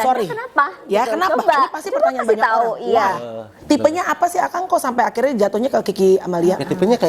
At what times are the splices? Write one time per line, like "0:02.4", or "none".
0:03.5